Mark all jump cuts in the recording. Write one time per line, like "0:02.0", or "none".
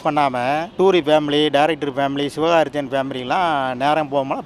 none